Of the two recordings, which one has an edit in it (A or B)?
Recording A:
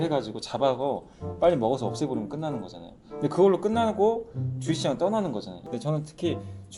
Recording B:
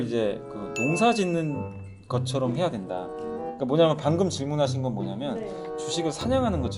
A